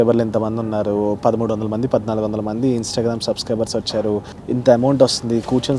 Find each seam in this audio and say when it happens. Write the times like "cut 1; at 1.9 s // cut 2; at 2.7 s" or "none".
cut 1; at 4.3 s

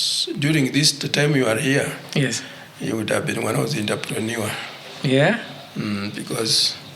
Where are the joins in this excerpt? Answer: none

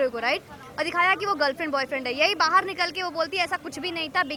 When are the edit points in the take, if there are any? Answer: none

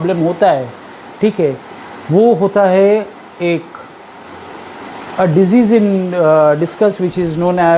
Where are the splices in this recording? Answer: none

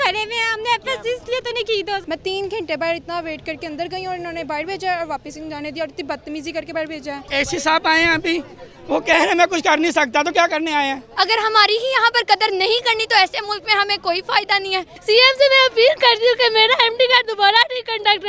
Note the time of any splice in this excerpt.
cut 1; at 2.0 s // cut 2; at 7.2 s // cut 3; at 11.0 s // cut 4; at 14.9 s

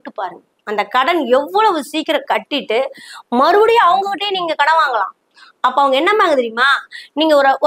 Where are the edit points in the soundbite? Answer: none

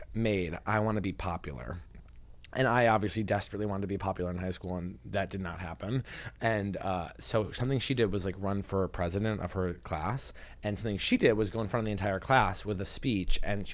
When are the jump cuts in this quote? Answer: none

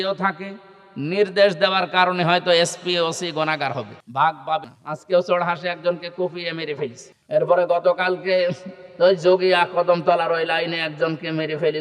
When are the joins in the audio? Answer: cut 1; at 4.0 s // cut 2; at 4.6 s // cut 3; at 7.1 s

